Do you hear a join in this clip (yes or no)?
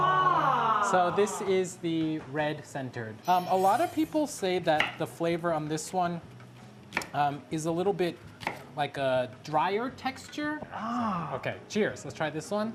no